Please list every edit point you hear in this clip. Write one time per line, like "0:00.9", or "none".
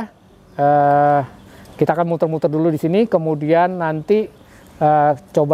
none

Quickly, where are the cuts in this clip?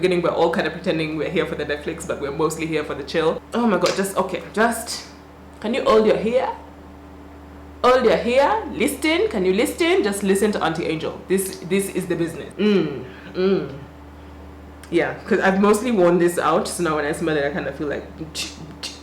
0:03.4
0:12.4

